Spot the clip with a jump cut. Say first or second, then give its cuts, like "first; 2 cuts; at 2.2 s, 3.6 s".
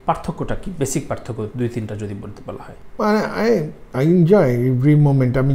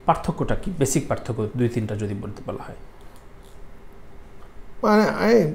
first; 1 cut; at 2.8 s